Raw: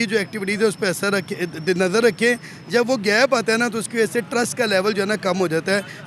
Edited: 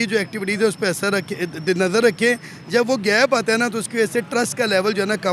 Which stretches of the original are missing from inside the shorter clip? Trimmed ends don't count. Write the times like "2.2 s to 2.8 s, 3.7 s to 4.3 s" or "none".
none